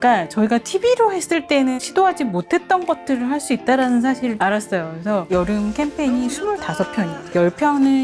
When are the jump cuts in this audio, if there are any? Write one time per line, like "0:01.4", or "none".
0:01.8
0:05.0